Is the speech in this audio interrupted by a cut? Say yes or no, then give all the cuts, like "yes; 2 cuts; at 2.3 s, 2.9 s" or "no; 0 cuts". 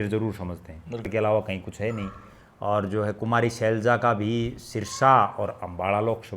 yes; 1 cut; at 1.1 s